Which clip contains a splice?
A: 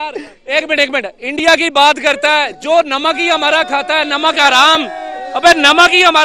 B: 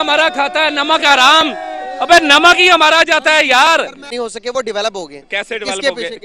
B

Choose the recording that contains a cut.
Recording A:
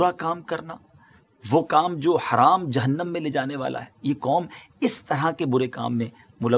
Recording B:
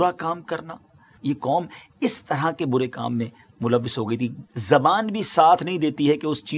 B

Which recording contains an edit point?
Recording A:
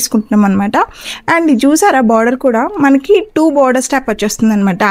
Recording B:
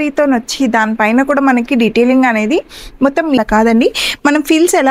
B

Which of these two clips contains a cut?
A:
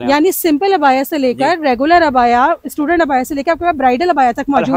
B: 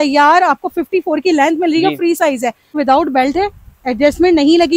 B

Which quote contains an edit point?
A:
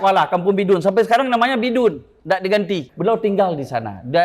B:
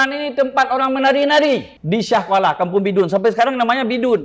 A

